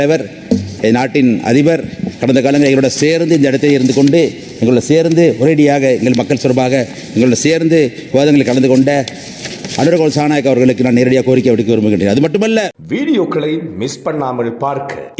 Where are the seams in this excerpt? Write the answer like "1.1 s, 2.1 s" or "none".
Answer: 12.8 s